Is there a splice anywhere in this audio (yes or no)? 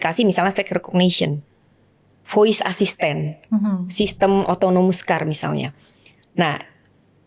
no